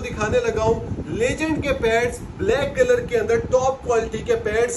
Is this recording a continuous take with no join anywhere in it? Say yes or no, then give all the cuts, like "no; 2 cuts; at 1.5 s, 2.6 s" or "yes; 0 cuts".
yes; 0 cuts